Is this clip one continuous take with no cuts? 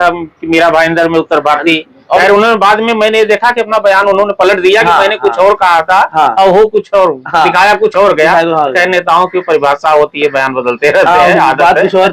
yes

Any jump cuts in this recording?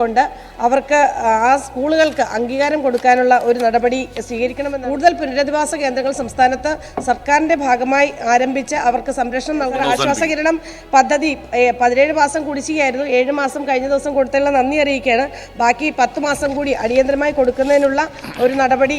yes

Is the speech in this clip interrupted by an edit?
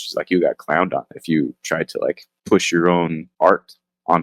yes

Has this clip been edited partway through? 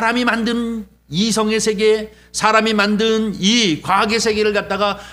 no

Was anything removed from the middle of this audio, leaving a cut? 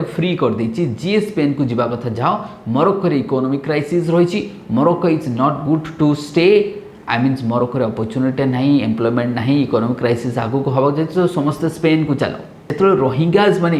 yes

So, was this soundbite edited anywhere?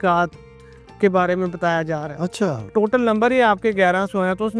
yes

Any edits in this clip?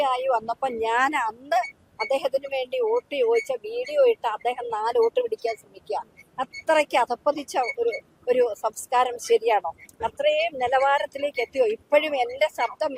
no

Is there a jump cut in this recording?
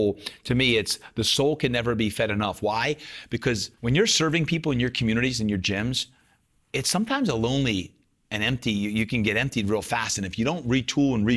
yes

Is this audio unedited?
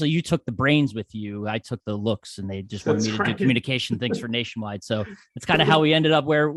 yes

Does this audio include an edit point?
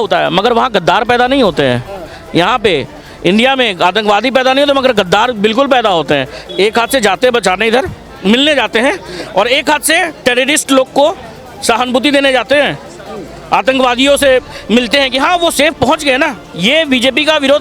yes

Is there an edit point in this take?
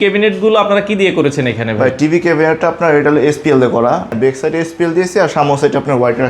yes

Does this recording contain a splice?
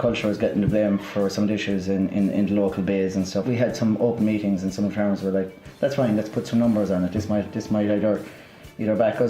yes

